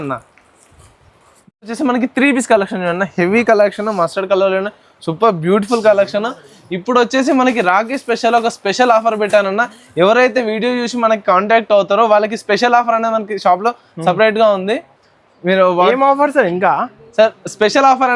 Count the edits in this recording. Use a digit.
0